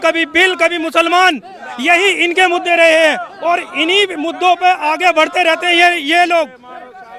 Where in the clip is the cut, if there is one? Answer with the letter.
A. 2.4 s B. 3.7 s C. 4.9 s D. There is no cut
D